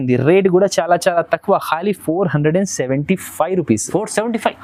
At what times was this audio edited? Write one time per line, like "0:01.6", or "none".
none